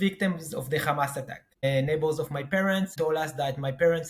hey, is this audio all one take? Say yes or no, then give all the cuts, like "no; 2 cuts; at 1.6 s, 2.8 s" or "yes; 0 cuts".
no; 2 cuts; at 1.5 s, 2.9 s